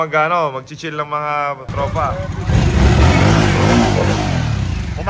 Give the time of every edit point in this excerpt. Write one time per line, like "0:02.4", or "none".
0:02.3